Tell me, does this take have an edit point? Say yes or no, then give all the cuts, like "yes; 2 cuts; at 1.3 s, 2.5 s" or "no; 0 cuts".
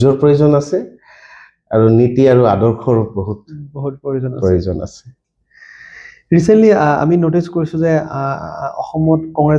no; 0 cuts